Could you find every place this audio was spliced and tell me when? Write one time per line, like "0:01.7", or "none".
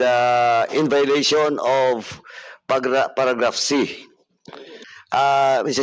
0:04.8